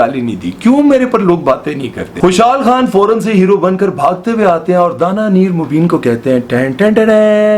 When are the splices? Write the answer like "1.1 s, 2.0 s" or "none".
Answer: 2.2 s